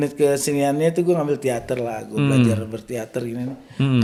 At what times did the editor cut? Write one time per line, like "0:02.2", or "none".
none